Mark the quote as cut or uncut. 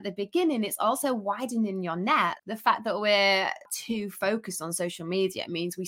cut